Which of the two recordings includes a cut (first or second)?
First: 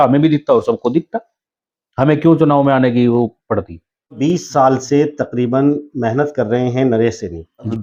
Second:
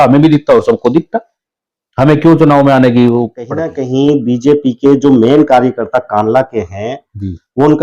second